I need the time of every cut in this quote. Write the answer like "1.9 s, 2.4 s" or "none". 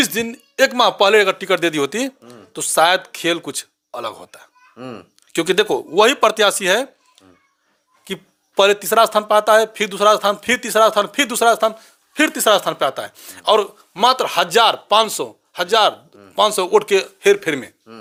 none